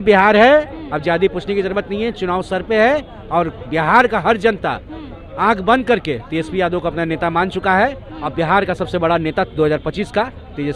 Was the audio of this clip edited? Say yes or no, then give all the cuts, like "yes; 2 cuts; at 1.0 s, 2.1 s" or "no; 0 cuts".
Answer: no; 0 cuts